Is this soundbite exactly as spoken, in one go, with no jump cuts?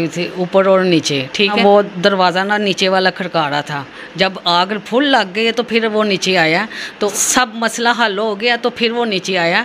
no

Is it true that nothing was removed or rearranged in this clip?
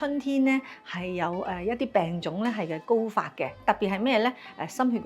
no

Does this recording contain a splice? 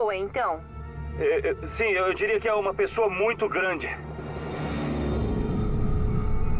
yes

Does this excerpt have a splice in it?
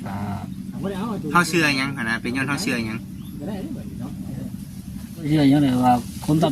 yes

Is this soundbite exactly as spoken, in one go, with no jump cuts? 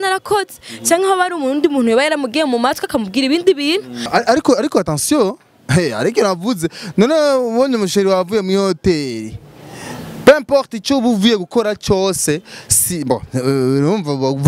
no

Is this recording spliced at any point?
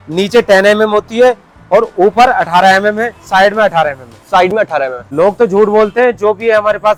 no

